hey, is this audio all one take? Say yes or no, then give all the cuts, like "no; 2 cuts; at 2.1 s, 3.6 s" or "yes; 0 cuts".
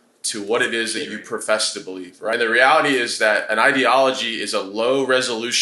no; 1 cut; at 2.3 s